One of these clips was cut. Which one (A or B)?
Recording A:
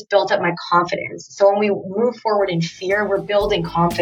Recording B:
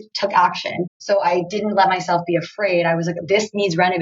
B